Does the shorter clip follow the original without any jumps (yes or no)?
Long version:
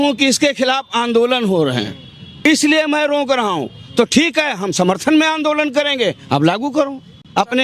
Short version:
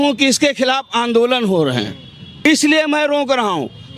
yes